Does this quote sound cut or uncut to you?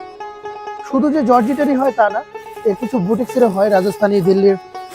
cut